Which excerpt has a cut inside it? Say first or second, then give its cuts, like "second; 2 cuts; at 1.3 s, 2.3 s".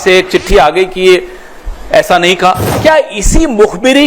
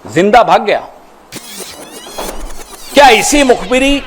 first; 1 cut; at 2.7 s